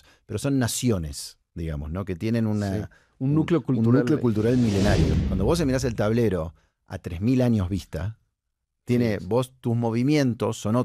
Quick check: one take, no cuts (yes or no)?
no